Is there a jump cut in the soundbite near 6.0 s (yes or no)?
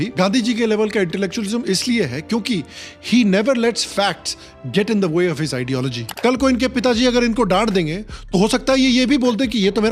yes